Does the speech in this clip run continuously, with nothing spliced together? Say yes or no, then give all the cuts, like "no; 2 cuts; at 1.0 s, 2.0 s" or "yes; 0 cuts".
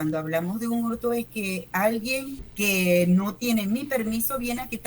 no; 1 cut; at 2.4 s